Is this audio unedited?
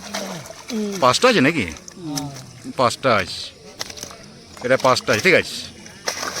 yes; 0 cuts

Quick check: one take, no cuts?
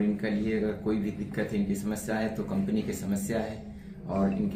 yes; 0 cuts

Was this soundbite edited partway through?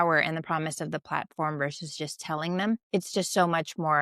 yes; 1 cut; at 2.8 s

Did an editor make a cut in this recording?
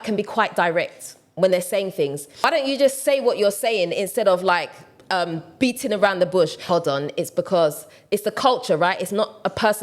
yes; 2 cuts; at 2.4 s, 6.6 s

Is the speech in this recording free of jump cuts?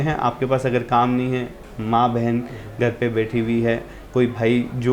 yes; 0 cuts

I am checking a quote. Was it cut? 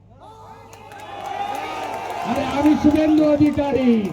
no; 0 cuts

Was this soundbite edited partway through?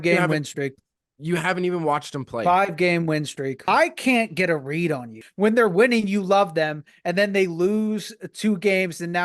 yes; 2 cuts; at 3.6 s, 5.2 s

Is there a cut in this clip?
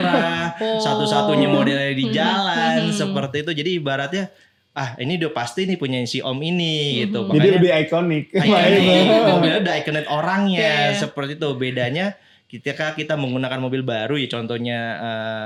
no; 0 cuts

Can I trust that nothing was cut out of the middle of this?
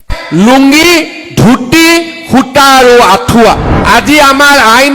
no; 1 cut; at 3.7 s

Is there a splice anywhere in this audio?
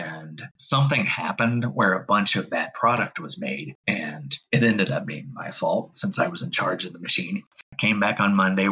yes; 1 cut; at 7.5 s

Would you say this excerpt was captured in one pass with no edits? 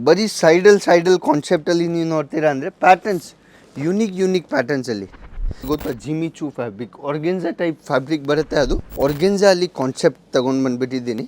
no; 2 cuts; at 5.6 s, 8.8 s

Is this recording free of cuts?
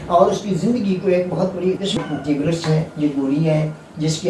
no; 1 cut; at 1.9 s

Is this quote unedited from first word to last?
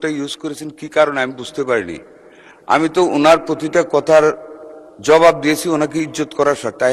yes; 0 cuts

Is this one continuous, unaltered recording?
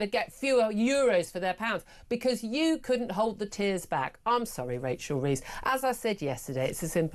yes; 0 cuts

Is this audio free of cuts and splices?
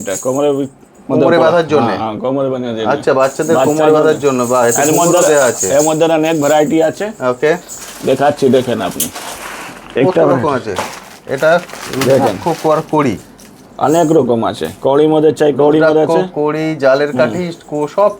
yes; 0 cuts

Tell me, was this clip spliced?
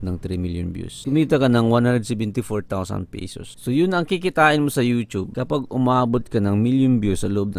no; 0 cuts

